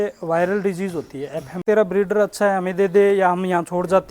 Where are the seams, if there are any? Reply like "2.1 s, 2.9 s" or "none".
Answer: 1.6 s